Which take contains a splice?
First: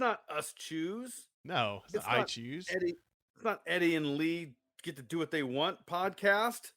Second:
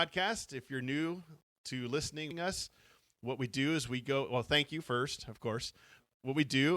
second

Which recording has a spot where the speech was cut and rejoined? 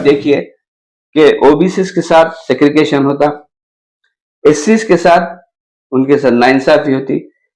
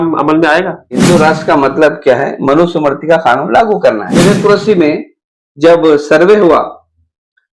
second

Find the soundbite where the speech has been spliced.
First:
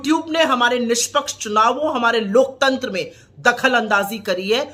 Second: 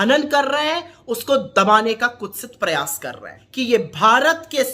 second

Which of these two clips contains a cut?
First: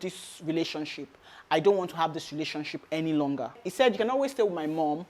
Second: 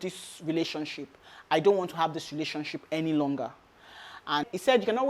first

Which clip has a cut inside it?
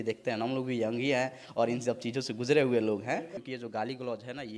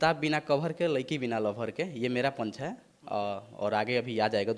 first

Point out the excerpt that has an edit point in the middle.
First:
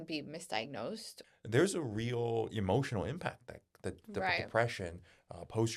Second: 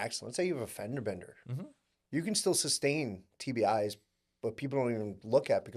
first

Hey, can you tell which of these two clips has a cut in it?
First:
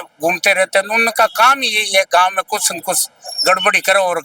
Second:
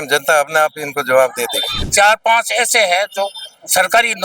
second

